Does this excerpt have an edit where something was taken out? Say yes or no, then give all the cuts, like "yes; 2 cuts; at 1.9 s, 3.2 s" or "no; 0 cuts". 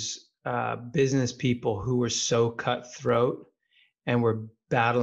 no; 0 cuts